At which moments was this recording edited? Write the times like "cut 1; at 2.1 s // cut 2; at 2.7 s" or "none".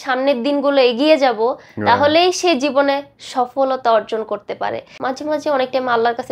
cut 1; at 4.9 s